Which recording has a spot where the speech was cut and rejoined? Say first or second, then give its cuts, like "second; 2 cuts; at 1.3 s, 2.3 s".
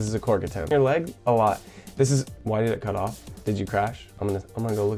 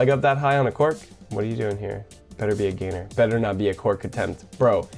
first; 4 cuts; at 0.7 s, 2.3 s, 3.3 s, 4.0 s